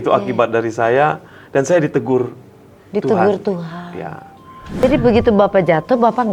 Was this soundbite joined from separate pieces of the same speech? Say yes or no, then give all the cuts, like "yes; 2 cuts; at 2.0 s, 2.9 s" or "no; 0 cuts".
yes; 1 cut; at 4.7 s